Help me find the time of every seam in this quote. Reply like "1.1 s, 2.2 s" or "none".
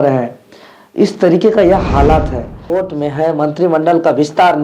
2.7 s